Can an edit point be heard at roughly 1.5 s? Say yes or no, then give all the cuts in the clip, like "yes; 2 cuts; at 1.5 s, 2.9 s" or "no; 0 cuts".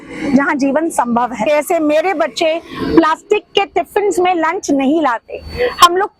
yes; 1 cut; at 1.5 s